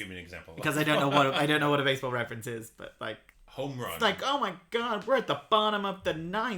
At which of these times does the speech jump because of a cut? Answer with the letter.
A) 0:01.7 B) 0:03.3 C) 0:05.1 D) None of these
B